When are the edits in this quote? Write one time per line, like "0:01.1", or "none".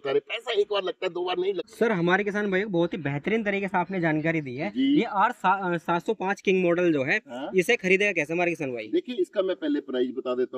none

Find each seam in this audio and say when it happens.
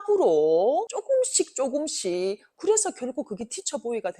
0:00.9
0:02.5

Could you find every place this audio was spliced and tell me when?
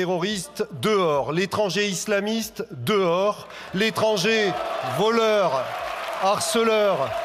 none

